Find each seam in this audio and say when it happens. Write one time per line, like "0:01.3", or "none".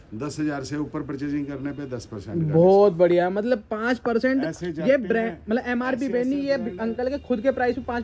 none